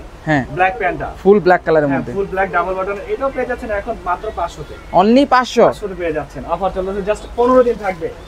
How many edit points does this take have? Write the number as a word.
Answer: zero